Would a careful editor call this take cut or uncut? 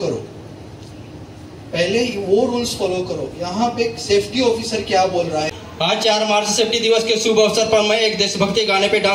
cut